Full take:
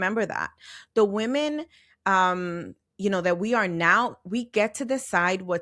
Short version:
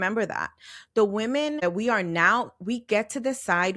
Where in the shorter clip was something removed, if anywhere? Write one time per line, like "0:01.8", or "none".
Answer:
0:01.6